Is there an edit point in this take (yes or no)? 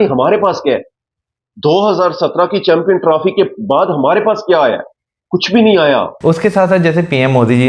yes